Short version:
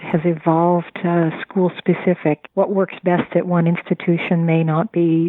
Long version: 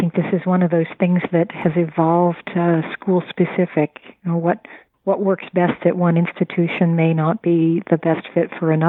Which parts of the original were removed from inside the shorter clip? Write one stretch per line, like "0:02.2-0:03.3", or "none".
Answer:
0:04.0-0:05.0